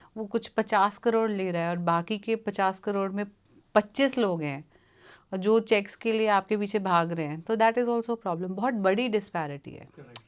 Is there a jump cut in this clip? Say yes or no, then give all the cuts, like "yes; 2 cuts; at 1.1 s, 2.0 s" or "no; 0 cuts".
no; 0 cuts